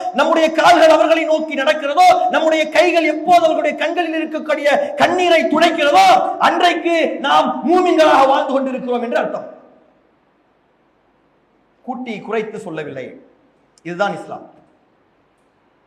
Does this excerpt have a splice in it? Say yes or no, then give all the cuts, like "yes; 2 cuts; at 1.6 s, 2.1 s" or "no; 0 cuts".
no; 0 cuts